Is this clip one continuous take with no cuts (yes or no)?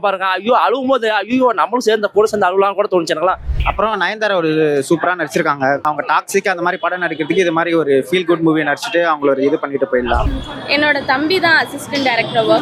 no